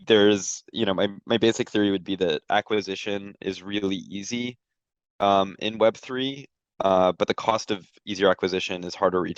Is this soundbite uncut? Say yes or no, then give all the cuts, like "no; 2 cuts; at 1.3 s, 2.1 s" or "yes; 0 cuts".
yes; 0 cuts